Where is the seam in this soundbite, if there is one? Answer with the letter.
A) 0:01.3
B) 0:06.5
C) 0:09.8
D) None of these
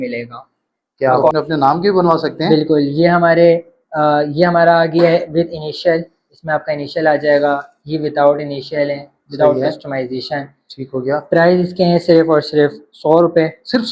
A